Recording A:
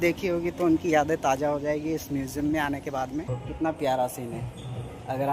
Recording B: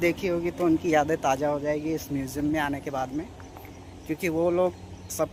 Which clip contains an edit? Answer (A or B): A